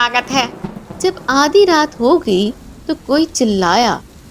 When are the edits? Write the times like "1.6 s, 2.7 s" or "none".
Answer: none

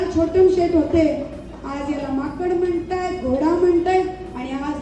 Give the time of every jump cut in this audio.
none

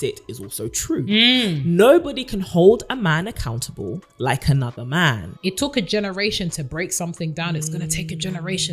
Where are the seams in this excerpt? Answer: 5.3 s

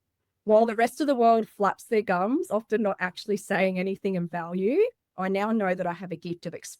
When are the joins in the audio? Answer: 5.1 s

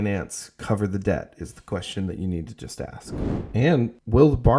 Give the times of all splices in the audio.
3.4 s

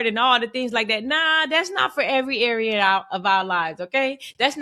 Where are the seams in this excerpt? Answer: none

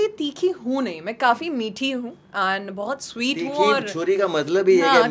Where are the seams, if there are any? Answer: none

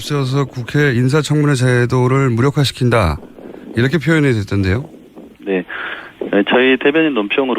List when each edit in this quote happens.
3.2 s

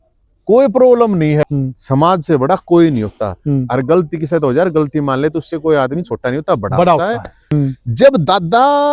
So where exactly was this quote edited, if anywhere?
1.4 s, 7.4 s

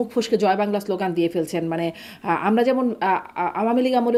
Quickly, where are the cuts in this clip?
none

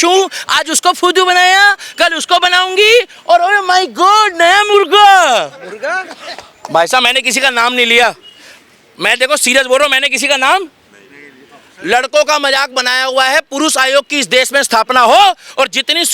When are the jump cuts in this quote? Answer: none

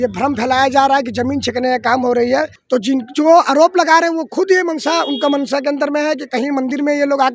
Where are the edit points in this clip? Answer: 2.6 s

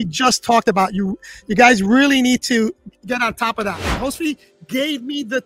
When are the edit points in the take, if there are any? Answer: 3.9 s

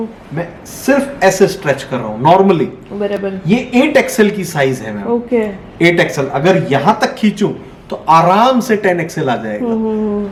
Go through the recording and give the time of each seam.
none

